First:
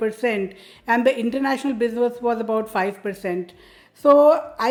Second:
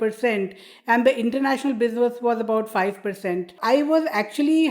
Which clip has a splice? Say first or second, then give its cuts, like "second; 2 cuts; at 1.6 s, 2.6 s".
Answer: second; 1 cut; at 3.5 s